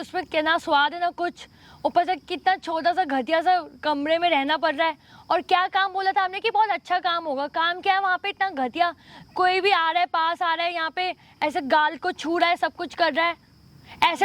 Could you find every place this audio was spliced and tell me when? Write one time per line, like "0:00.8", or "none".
none